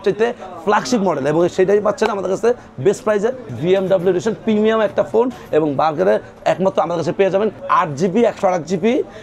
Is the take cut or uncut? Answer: cut